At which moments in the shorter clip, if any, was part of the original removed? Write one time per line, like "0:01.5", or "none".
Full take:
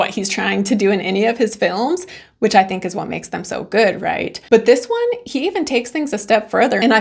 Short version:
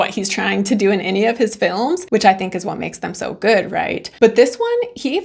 0:02.0